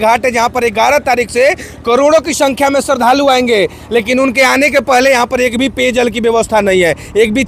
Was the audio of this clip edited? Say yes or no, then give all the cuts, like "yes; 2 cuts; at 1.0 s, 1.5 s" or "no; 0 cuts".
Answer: no; 0 cuts